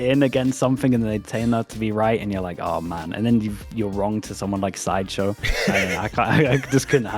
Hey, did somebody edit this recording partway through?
no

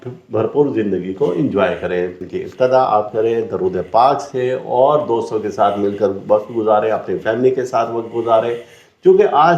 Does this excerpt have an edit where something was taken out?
yes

